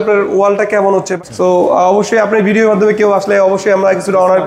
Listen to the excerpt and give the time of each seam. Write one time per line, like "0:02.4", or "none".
0:01.1